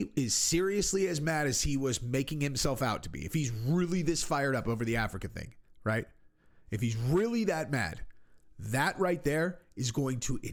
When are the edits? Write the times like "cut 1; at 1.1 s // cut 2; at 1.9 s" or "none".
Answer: none